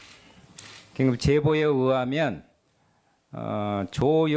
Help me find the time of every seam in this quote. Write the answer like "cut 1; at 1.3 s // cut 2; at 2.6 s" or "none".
cut 1; at 1.9 s